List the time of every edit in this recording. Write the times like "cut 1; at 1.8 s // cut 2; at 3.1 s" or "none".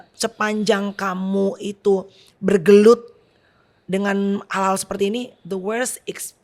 none